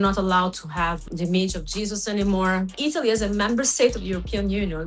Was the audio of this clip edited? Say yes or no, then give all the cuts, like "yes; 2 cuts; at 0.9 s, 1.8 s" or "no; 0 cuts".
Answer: yes; 2 cuts; at 1.0 s, 2.7 s